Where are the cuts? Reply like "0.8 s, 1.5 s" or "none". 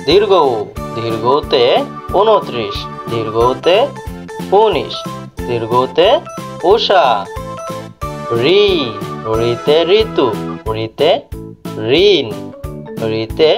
none

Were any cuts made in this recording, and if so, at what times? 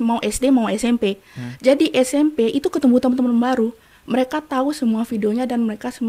none

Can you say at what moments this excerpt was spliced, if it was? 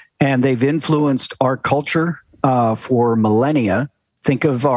none

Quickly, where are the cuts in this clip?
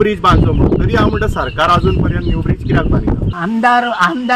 3.3 s

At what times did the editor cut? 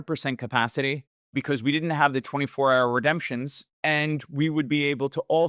1.1 s, 3.6 s

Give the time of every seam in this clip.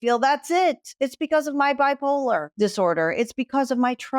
2.5 s

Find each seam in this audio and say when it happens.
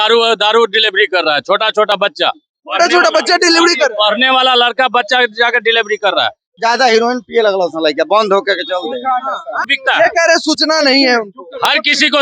6.5 s, 9.8 s

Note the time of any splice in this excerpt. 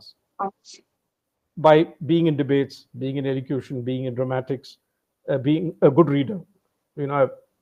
none

